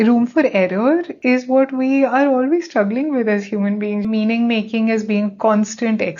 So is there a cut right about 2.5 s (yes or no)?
no